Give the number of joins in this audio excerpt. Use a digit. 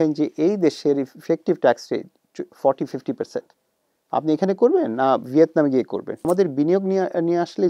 1